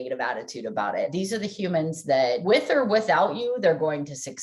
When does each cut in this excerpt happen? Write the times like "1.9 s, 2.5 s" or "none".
1.1 s, 2.4 s